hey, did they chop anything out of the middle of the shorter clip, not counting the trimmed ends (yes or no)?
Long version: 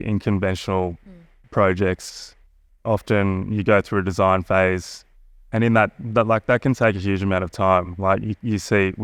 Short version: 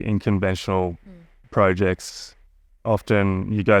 no